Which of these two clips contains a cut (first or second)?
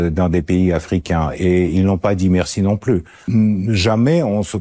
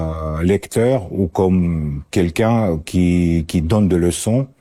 first